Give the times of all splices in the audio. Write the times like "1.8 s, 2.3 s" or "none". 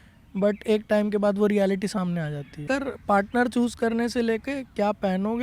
2.6 s